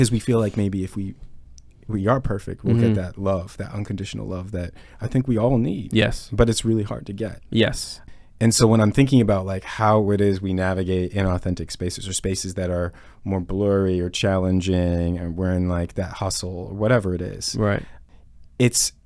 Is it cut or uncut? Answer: cut